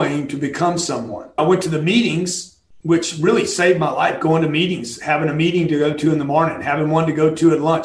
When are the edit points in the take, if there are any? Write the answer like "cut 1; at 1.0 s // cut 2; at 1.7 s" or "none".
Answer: cut 1; at 1.4 s